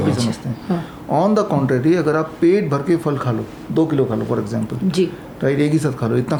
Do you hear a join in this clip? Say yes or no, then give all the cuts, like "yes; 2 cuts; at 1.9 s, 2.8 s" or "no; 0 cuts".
no; 0 cuts